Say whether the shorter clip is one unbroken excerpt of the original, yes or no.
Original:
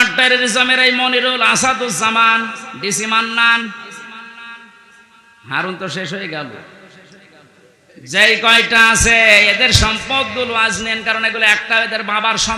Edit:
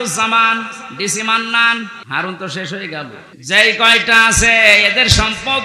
no